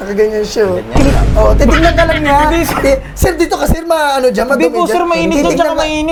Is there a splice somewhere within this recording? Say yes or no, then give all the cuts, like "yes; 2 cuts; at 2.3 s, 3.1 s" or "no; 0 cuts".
no; 0 cuts